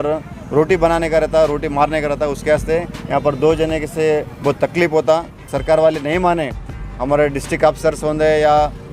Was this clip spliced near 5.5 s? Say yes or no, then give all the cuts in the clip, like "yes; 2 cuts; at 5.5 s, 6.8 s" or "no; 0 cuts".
yes; 1 cut; at 5.5 s